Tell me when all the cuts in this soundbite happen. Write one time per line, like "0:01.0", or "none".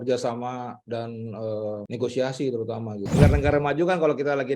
0:01.8
0:03.0